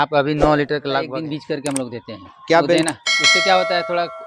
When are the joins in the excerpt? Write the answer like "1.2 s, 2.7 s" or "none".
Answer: 1.1 s